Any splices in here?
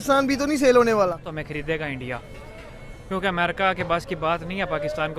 yes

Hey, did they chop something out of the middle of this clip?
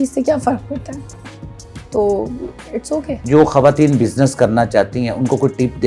no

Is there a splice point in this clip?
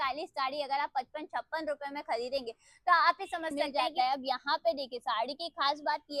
yes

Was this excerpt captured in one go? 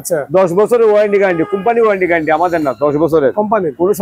yes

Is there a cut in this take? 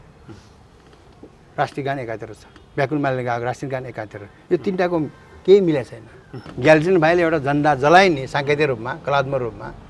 yes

